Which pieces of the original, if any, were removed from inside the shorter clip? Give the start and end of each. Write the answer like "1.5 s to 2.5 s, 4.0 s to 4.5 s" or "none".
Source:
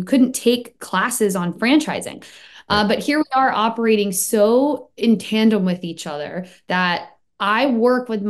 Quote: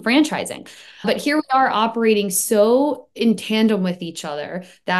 2.6 s to 2.9 s